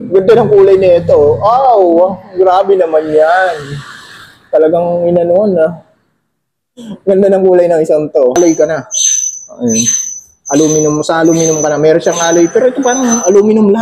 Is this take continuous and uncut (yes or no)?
no